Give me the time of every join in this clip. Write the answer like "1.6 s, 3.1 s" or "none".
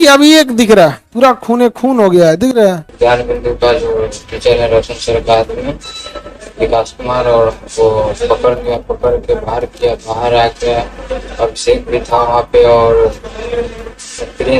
1.0 s, 2.8 s

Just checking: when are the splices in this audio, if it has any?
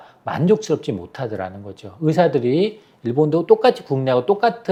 none

